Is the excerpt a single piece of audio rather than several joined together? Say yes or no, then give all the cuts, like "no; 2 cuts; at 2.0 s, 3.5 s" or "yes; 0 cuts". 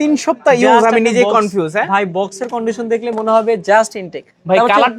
yes; 0 cuts